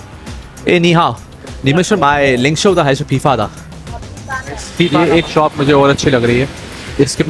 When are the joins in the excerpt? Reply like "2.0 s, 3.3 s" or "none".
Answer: 4.9 s